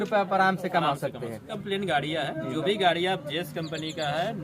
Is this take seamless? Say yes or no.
no